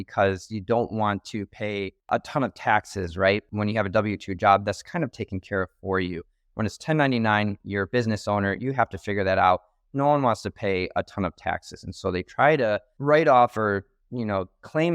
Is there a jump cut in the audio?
no; 0 cuts

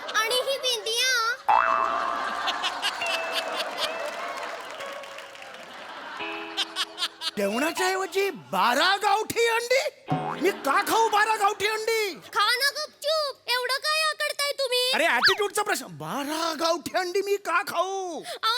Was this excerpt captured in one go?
no; 1 cut; at 7.3 s

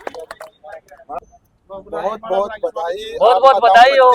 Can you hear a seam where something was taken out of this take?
yes; 1 cut; at 1.2 s

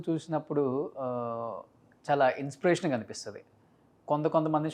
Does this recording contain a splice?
no; 0 cuts

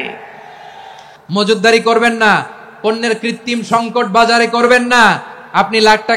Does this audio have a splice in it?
yes; 1 cut; at 1.1 s

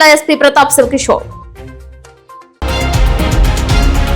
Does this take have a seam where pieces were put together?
yes; 1 cut; at 2.6 s

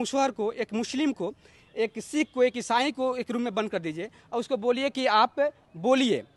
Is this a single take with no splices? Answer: yes; 0 cuts

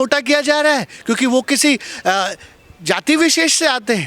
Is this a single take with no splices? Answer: yes; 0 cuts

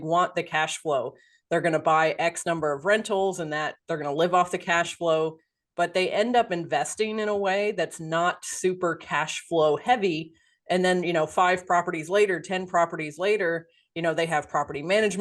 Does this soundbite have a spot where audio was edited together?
yes; 1 cut; at 1.3 s

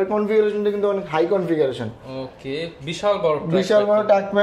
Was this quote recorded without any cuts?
yes; 0 cuts

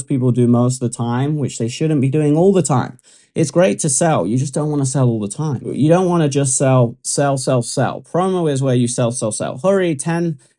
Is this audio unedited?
no; 1 cut; at 5.7 s

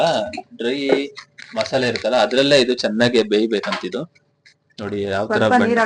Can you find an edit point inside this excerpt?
no; 0 cuts

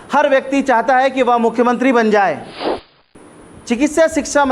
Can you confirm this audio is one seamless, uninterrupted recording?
no; 1 cut; at 3.0 s

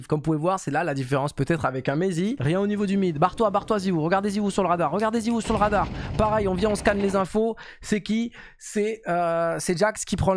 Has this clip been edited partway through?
yes; 1 cut; at 2.4 s

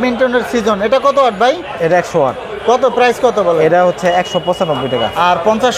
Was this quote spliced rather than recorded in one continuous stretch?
no; 0 cuts

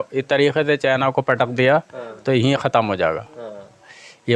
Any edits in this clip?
no; 0 cuts

